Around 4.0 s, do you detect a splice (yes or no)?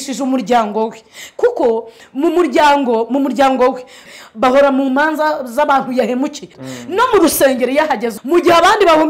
yes